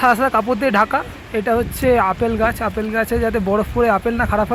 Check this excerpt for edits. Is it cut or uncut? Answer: uncut